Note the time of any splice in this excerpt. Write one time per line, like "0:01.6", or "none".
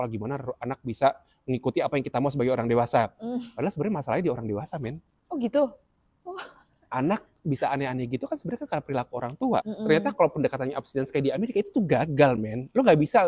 0:09.6